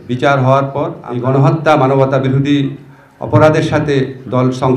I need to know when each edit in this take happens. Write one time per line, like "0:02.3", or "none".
0:01.0